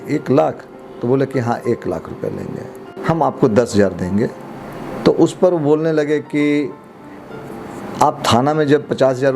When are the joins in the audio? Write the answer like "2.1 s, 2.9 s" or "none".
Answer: 2.8 s